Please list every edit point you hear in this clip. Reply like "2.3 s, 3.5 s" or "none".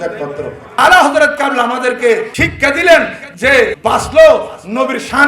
0.7 s, 2.3 s, 3.8 s